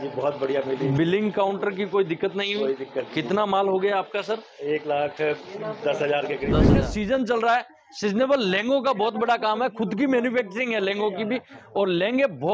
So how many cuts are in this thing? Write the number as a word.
one